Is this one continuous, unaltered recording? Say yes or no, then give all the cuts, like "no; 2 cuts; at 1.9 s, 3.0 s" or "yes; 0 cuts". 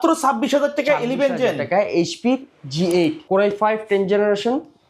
no; 1 cut; at 3.2 s